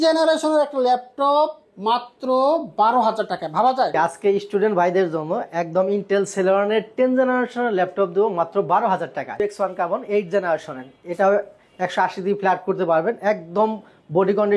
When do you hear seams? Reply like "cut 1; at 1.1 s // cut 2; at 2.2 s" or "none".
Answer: cut 1; at 3.9 s // cut 2; at 9.4 s